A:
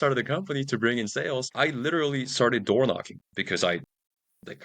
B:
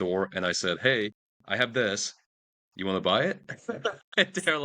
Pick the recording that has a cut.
A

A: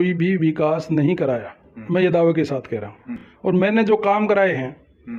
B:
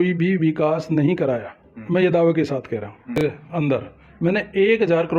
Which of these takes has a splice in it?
B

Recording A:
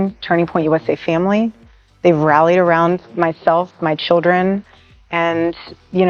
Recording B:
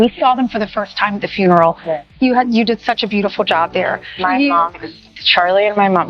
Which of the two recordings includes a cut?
B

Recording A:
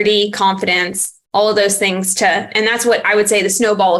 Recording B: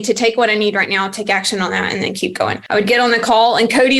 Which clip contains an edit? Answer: B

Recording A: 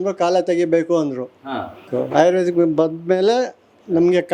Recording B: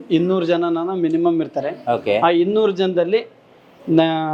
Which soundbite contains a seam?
A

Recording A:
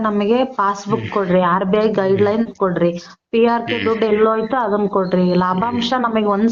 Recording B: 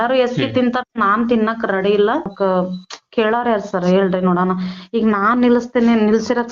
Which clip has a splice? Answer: B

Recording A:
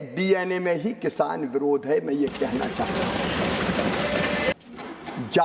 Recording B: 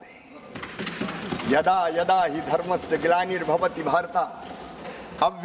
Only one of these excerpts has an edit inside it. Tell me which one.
A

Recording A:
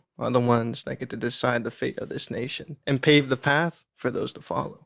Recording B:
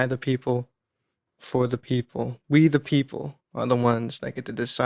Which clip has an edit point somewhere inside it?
B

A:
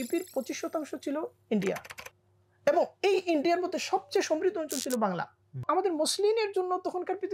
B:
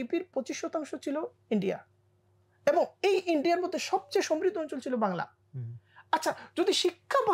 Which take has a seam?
A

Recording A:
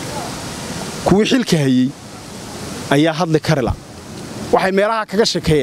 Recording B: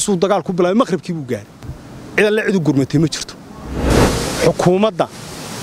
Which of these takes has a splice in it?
B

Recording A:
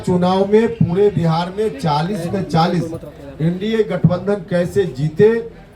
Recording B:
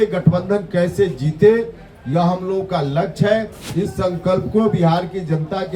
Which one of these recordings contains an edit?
B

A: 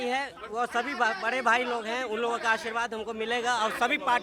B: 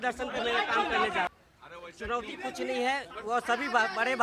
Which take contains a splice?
B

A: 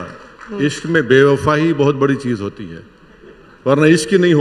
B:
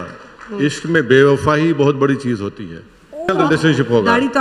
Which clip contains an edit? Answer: B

